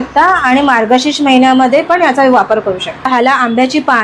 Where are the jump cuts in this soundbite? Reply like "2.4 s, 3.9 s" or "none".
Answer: 3.1 s